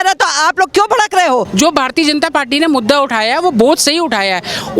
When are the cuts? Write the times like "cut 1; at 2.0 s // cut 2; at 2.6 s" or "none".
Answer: cut 1; at 1.5 s